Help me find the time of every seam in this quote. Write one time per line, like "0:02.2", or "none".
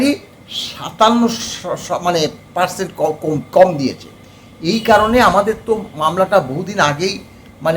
none